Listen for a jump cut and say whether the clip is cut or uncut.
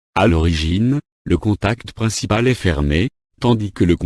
cut